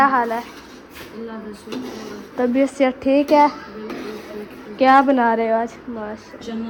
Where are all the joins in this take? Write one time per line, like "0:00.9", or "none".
none